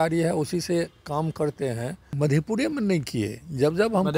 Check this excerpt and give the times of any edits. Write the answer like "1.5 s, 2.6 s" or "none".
2.0 s